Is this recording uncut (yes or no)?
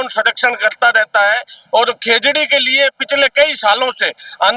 yes